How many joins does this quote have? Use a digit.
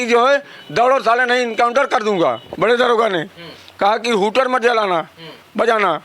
1